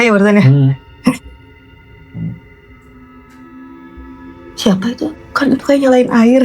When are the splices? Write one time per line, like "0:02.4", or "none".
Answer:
0:05.2